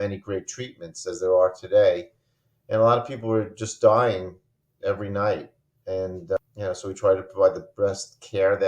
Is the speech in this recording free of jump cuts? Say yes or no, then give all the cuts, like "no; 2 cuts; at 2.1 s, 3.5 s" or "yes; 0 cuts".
no; 1 cut; at 6.4 s